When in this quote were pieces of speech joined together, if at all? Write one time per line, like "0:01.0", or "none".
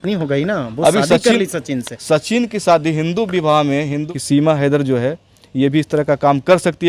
0:04.0